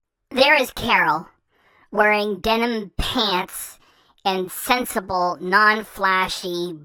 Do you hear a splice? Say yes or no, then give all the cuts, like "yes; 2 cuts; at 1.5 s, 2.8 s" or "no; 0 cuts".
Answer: no; 0 cuts